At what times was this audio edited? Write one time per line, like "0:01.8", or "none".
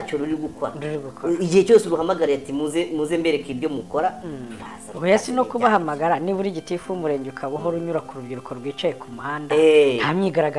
none